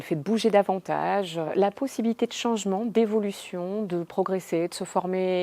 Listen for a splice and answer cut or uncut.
uncut